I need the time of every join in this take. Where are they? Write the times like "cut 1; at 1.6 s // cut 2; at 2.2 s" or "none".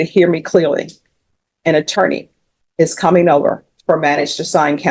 none